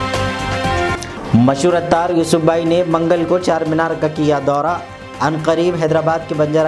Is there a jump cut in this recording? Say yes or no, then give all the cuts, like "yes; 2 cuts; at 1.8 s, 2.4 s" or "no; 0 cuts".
yes; 1 cut; at 1.0 s